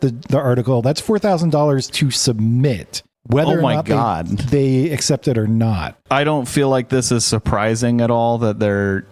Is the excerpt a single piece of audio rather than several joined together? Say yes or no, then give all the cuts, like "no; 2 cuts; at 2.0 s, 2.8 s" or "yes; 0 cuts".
no; 1 cut; at 6.0 s